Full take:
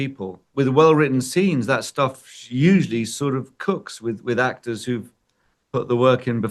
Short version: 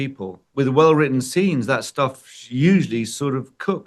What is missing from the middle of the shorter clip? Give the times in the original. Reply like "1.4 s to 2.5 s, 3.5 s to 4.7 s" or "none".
none